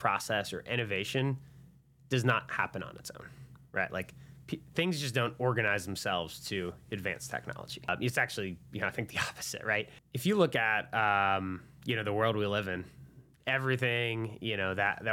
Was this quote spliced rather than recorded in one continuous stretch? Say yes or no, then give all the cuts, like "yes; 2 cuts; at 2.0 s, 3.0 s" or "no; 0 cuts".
yes; 2 cuts; at 7.9 s, 10.0 s